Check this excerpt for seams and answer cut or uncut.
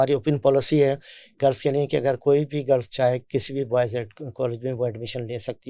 uncut